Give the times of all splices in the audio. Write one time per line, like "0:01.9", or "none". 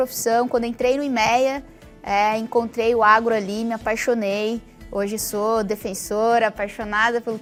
none

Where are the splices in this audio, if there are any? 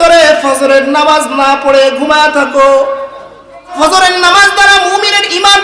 0:03.7

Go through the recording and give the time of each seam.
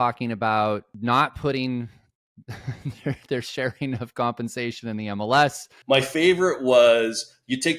0:00.9
0:05.6

